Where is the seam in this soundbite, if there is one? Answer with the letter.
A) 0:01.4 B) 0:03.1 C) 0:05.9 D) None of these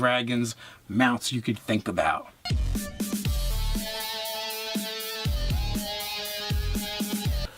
D